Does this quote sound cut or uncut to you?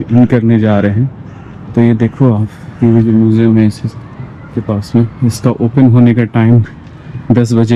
uncut